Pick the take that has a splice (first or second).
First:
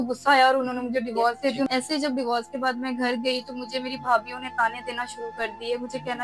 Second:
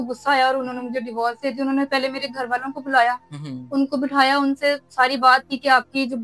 first